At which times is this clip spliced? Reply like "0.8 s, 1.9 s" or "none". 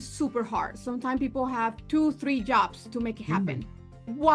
none